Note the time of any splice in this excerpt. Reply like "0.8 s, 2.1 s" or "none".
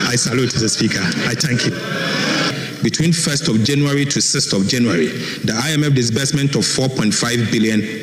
2.6 s